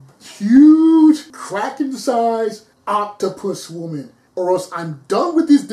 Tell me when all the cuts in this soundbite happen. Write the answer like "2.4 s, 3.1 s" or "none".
1.4 s, 2.7 s, 4.2 s